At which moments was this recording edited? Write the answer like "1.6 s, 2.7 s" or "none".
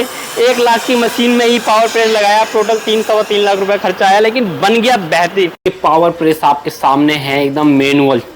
5.7 s